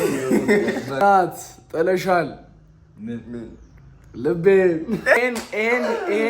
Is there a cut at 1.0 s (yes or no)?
yes